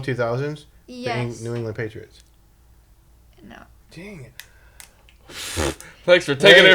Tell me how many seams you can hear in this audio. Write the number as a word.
zero